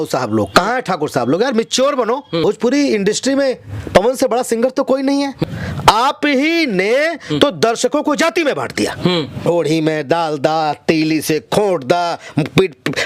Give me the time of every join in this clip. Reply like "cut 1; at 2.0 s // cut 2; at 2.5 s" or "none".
cut 1; at 2.4 s // cut 2; at 5.4 s // cut 3; at 9.5 s